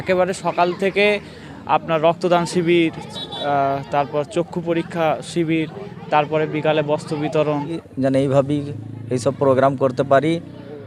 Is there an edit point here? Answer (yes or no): yes